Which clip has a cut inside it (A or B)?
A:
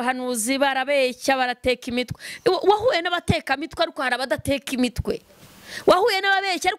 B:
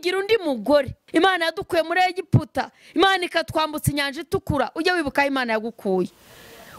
B